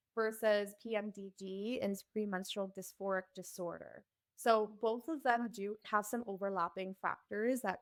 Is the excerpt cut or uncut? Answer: uncut